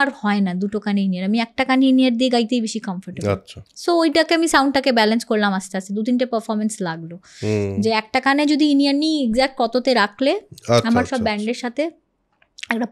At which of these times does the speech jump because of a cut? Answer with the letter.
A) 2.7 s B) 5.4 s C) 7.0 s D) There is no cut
D